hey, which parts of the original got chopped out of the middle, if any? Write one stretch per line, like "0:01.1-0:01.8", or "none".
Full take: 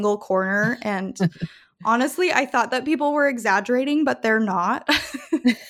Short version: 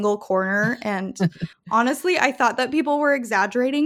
0:01.5-0:01.6

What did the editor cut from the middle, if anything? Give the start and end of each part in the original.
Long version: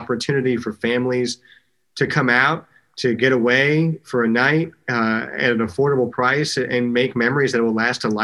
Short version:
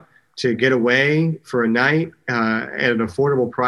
none

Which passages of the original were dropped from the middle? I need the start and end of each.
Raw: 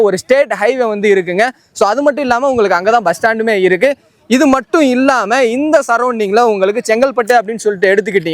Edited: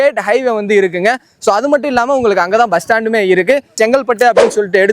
0:04.1-0:06.8

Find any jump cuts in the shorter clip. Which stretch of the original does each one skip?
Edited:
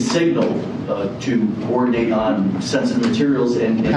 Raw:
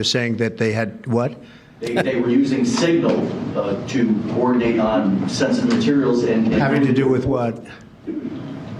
none

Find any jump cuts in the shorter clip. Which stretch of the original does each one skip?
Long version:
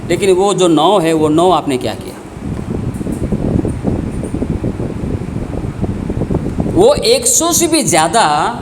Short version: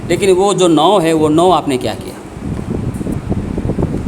0:03.2-0:05.7

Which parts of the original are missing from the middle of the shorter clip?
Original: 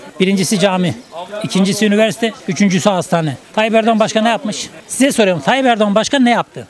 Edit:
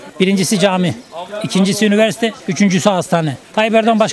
none

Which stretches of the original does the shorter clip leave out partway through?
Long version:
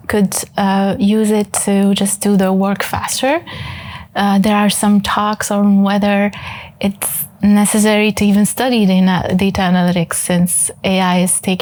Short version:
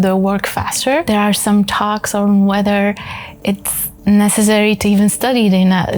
0:03.4-0:04.4

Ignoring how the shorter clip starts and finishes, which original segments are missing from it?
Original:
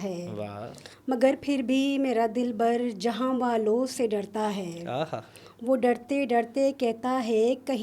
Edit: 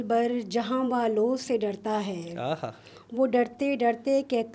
none

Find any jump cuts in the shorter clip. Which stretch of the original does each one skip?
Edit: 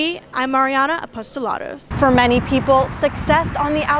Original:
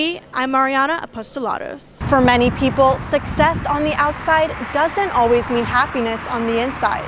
0:01.8-0:01.9

